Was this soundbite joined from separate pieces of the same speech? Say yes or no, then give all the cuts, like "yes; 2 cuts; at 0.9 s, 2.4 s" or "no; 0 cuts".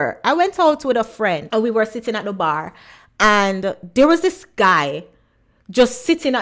yes; 1 cut; at 1.4 s